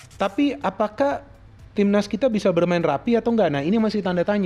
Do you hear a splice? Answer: no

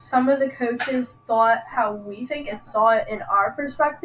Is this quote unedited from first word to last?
yes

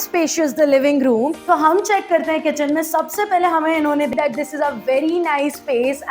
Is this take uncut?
no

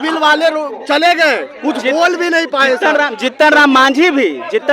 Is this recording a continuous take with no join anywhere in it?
yes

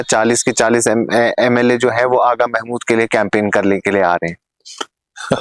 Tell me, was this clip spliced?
no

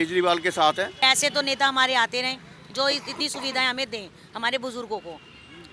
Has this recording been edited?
yes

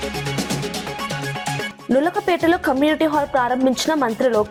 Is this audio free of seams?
yes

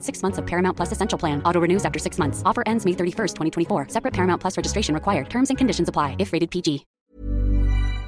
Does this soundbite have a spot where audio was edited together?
yes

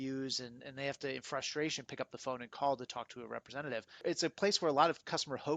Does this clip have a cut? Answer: yes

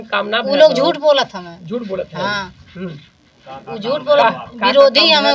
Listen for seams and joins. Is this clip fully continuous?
yes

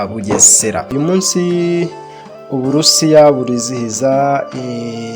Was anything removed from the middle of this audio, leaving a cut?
yes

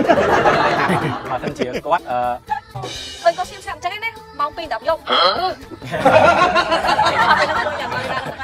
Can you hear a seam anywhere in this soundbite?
yes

